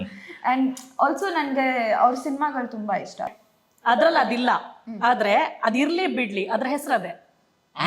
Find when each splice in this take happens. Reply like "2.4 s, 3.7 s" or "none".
3.4 s